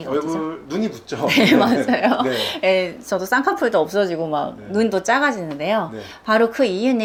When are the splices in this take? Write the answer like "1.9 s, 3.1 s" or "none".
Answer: none